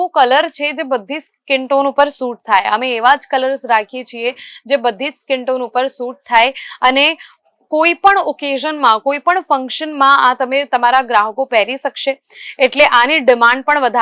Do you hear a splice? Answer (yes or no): no